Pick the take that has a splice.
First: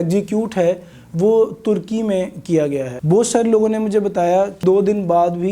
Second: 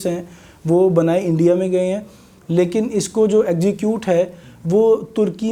first; 2 cuts; at 2.9 s, 4.6 s

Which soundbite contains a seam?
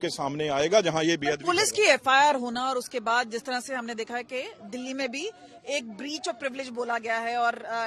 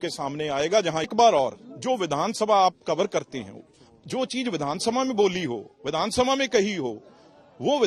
second; 1 cut; at 1.1 s

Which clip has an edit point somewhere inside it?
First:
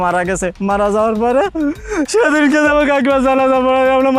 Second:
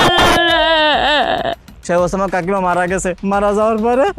second; 1 cut; at 1.7 s

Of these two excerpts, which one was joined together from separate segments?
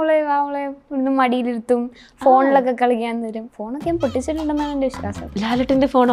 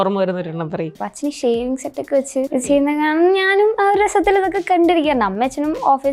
second; 2 cuts; at 0.9 s, 2.6 s

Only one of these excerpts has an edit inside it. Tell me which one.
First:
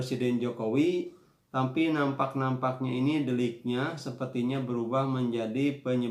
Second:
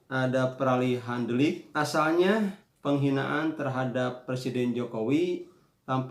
second; 2 cuts; at 1.6 s, 2.7 s

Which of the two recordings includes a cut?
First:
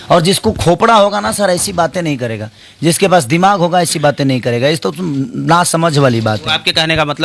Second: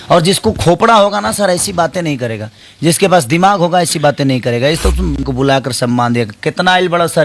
second; 1 cut; at 5.3 s

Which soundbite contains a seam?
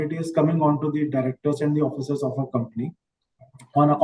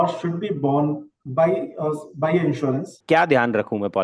second; 1 cut; at 2.9 s

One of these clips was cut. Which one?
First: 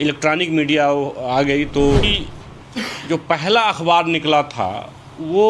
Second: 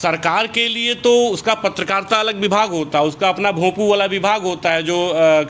first; 1 cut; at 2.2 s

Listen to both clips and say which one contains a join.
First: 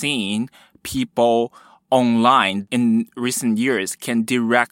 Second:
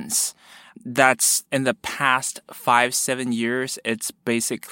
first; 1 cut; at 2.6 s

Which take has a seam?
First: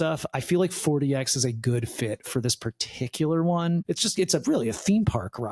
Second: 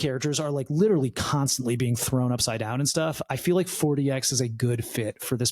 first; 1 cut; at 3.8 s

